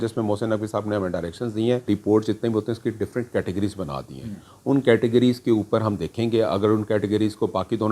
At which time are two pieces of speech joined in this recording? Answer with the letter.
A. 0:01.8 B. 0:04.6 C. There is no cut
A